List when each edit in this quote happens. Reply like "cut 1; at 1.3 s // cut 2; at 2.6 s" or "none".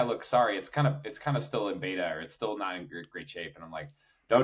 none